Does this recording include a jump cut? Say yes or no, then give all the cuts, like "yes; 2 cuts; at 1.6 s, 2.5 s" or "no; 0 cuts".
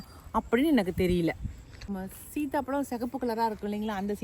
yes; 1 cut; at 1.9 s